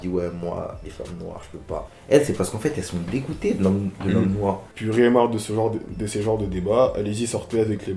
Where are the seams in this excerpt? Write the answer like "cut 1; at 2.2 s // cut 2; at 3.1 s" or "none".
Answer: cut 1; at 1.9 s // cut 2; at 4.7 s

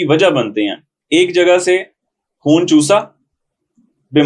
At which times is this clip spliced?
none

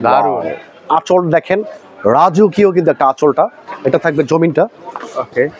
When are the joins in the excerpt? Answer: cut 1; at 3.6 s

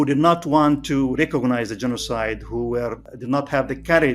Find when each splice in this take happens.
cut 1; at 3.1 s

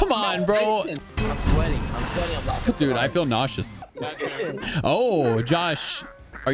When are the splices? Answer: cut 1; at 1.0 s // cut 2; at 3.7 s

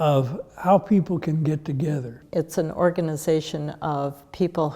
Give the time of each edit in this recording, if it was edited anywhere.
cut 1; at 2.2 s

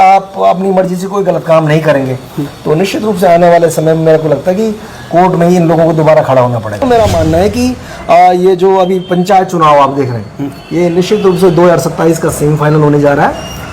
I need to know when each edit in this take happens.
cut 1; at 6.8 s

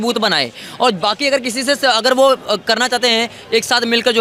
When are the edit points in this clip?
none

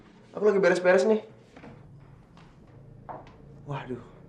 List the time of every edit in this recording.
cut 1; at 2.7 s

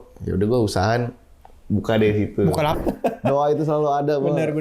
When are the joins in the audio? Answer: cut 1; at 2.8 s

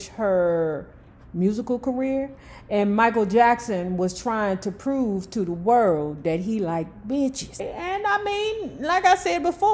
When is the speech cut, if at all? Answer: cut 1; at 7.7 s

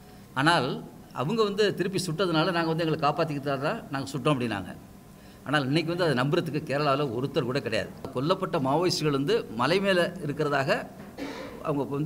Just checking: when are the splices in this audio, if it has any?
cut 1; at 8.1 s

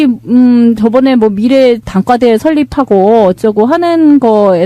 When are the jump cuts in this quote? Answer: cut 1; at 2.8 s

